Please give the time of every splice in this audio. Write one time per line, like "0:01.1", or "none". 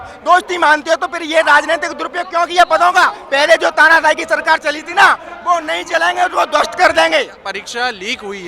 0:03.2
0:07.4